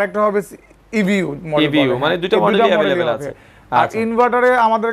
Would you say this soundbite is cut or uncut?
uncut